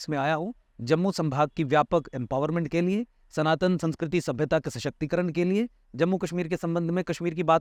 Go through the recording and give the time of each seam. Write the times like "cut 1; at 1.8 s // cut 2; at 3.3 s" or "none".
none